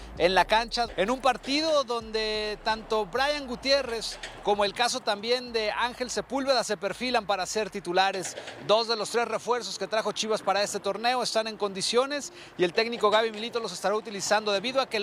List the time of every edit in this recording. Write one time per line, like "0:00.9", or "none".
0:00.9